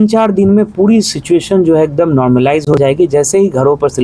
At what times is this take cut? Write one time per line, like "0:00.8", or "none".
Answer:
none